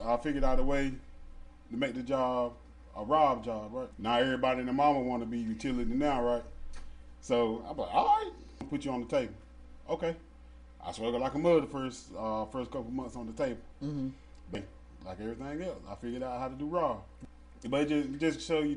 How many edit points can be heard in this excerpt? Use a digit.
4